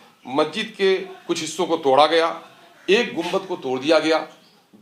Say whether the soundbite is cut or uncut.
uncut